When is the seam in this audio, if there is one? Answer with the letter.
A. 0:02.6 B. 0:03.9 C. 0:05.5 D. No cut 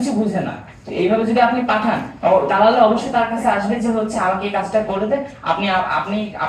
D